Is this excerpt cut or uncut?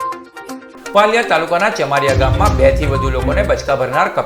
uncut